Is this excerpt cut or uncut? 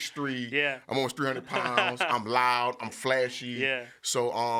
uncut